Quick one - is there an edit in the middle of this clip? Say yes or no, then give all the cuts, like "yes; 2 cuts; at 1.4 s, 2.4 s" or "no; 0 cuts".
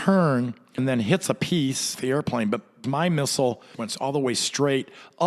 yes; 4 cuts; at 0.8 s, 2.0 s, 2.8 s, 3.8 s